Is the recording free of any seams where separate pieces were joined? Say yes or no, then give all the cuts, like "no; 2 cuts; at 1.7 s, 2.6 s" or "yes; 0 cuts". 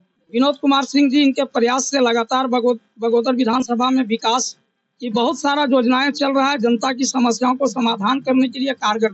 yes; 0 cuts